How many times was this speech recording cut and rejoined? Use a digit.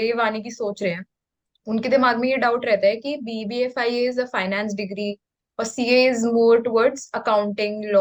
0